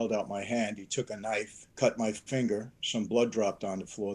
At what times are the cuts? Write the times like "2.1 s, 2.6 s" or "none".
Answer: 1.6 s